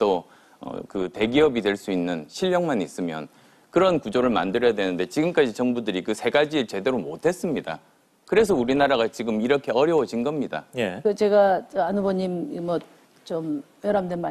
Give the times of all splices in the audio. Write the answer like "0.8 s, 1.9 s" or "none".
none